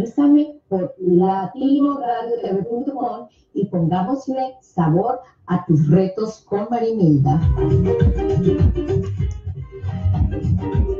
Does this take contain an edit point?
yes; 1 cut; at 10.1 s

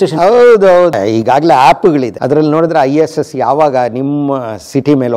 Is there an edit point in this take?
yes; 2 cuts; at 0.9 s, 2.1 s

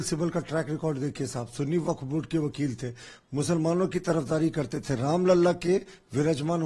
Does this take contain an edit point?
no; 0 cuts

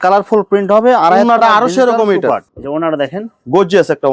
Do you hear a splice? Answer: no; 0 cuts

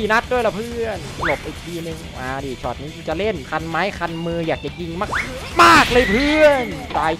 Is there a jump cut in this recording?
yes; 1 cut; at 3.4 s

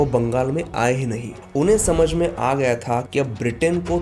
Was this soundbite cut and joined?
yes; 2 cuts; at 1.3 s, 3.1 s

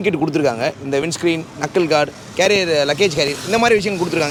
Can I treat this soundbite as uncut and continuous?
yes; 0 cuts

